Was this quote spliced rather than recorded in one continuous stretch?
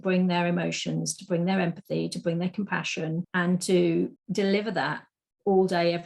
yes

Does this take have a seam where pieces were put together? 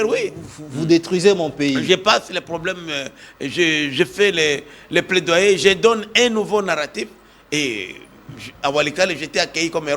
no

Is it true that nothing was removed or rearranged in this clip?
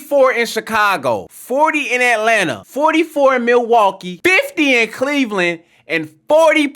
no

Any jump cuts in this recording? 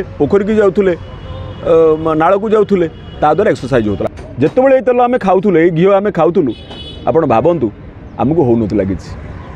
yes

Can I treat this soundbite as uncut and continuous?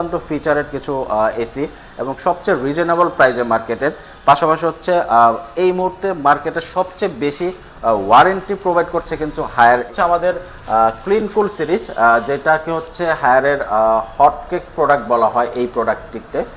no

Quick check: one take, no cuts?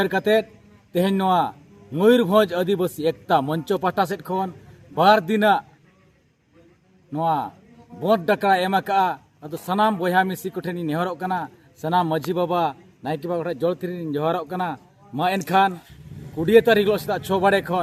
yes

